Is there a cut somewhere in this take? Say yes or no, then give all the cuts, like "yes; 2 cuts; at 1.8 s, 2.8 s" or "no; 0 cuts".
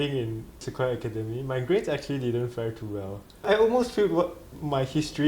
yes; 1 cut; at 3.3 s